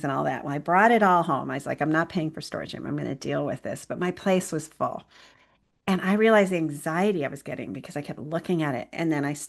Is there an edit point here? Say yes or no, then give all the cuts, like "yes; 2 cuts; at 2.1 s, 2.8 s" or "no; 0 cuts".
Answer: no; 0 cuts